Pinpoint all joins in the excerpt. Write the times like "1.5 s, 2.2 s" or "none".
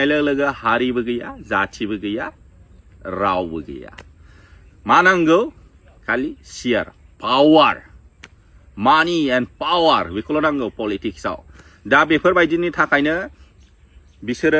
none